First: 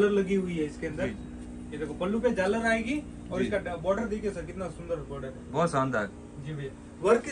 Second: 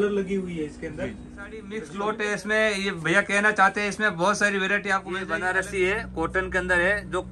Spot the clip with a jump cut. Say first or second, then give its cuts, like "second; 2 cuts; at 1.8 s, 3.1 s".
second; 2 cuts; at 1.8 s, 5.1 s